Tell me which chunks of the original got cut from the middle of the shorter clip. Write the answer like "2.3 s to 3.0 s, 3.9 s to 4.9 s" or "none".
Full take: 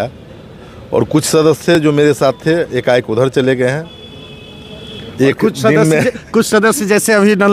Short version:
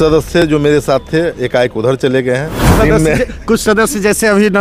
4.0 s to 5.6 s